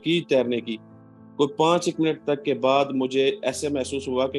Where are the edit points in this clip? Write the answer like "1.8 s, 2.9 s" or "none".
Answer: none